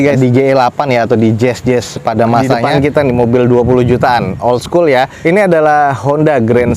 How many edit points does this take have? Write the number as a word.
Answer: one